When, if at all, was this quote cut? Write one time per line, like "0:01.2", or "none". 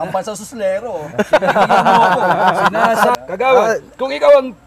0:03.2